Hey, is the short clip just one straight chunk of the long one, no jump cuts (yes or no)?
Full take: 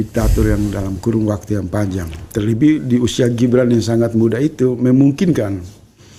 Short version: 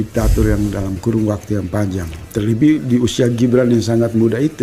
yes